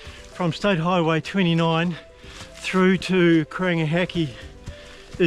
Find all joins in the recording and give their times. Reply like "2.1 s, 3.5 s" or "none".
none